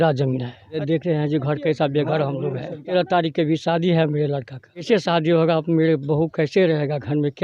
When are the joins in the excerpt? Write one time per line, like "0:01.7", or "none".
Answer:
0:00.8
0:02.8
0:04.8